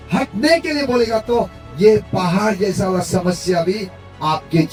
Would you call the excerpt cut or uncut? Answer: uncut